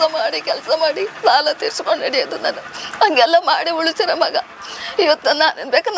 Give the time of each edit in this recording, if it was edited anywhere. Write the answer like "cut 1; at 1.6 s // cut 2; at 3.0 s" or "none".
none